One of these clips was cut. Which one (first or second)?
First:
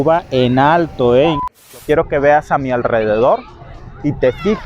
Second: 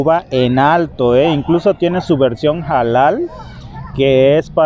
first